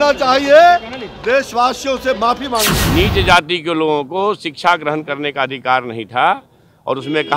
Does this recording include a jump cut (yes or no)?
yes